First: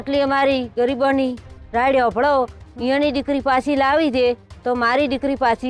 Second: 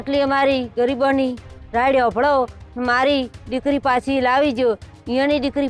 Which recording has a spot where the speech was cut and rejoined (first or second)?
first